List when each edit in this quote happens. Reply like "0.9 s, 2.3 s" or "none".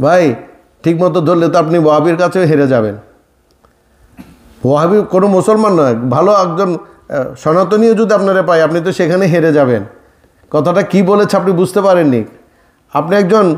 none